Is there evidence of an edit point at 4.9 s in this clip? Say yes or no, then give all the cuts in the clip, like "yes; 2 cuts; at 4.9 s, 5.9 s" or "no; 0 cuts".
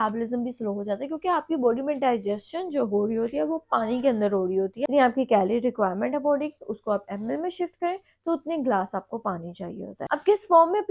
yes; 2 cuts; at 4.9 s, 10.0 s